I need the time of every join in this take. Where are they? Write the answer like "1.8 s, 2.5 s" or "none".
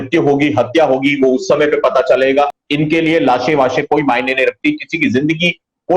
2.6 s

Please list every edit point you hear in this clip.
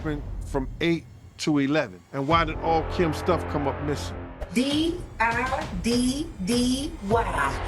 2.0 s, 4.4 s

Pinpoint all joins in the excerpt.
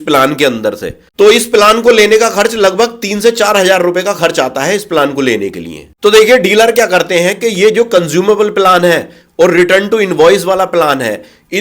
1.0 s

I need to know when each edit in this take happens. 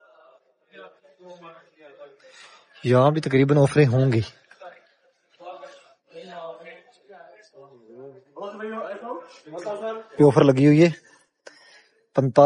none

